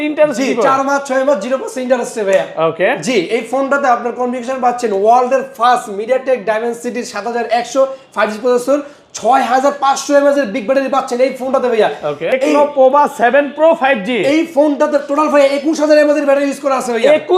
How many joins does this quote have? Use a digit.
1